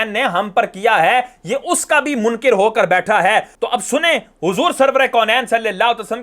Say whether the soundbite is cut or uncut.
uncut